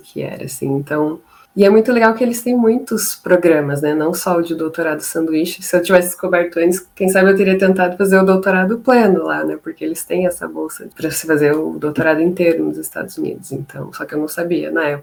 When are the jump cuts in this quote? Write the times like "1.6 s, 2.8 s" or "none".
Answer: none